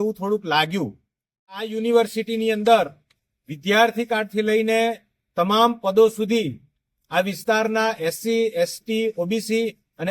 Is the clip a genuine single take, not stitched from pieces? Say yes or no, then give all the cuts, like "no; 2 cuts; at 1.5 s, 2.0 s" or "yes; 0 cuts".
no; 1 cut; at 1.7 s